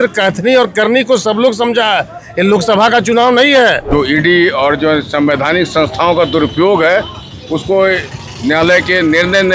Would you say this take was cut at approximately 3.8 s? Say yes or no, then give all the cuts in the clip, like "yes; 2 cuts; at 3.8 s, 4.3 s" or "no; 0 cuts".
yes; 1 cut; at 3.8 s